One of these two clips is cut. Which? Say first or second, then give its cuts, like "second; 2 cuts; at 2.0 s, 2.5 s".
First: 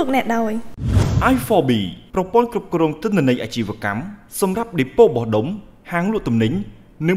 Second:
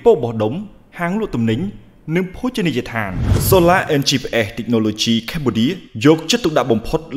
second; 1 cut; at 3.3 s